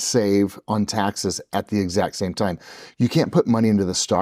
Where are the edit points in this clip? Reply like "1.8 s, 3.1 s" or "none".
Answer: none